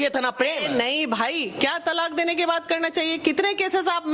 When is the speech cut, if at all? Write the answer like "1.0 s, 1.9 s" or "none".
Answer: none